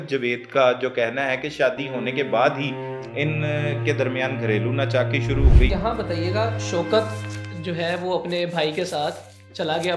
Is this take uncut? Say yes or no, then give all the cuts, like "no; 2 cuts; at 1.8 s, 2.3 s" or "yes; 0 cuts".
no; 1 cut; at 5.7 s